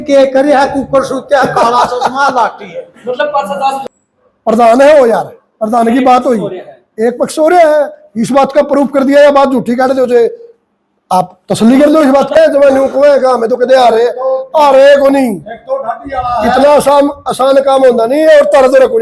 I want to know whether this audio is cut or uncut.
cut